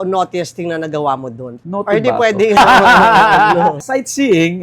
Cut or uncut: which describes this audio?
cut